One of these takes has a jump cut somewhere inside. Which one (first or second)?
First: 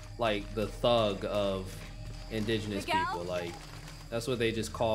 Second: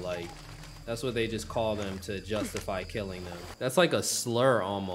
second